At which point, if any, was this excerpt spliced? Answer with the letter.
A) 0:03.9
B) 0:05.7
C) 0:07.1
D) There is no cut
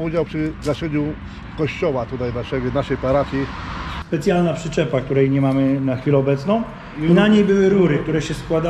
A